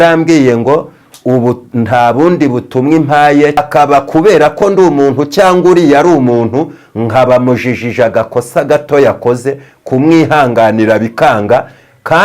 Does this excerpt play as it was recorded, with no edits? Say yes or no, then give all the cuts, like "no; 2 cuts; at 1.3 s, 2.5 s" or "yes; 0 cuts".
no; 1 cut; at 3.6 s